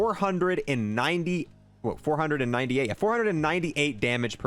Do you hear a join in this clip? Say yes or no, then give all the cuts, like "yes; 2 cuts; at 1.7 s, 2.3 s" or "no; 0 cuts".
no; 0 cuts